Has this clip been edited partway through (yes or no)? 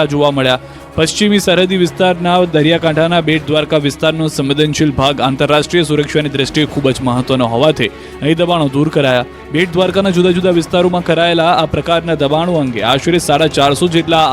yes